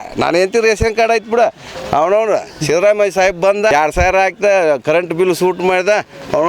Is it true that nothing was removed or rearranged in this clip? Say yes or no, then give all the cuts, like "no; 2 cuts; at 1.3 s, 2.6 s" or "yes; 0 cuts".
no; 1 cut; at 3.7 s